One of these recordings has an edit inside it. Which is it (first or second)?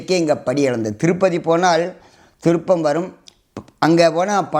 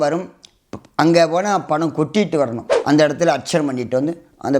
second